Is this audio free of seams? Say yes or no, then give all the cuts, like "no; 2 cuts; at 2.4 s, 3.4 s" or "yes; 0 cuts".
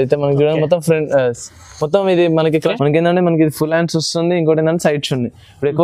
no; 1 cut; at 2.8 s